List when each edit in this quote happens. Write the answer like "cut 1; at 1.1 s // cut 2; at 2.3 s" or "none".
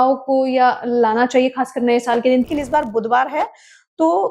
cut 1; at 2.4 s